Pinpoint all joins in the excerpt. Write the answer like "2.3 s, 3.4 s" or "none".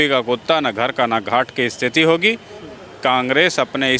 none